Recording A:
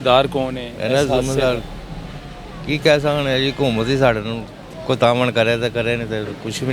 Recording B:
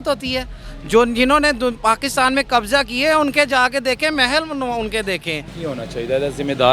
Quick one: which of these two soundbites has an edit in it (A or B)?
B